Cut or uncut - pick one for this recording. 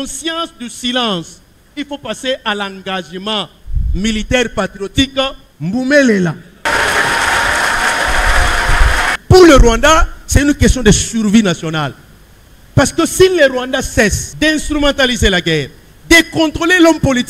cut